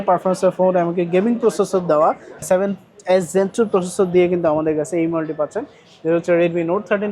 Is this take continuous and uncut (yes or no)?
no